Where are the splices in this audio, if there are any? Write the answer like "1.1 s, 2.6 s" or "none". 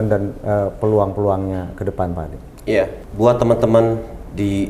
3.0 s